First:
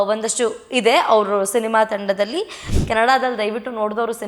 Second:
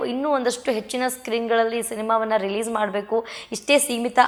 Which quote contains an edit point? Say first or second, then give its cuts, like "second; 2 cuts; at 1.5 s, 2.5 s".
first; 1 cut; at 2.7 s